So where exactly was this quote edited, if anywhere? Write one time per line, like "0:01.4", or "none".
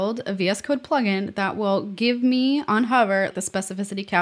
0:03.3